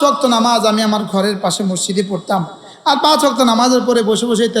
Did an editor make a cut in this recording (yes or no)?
no